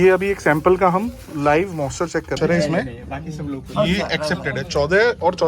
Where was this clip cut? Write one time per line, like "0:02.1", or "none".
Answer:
0:02.4